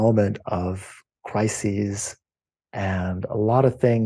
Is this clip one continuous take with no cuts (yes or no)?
yes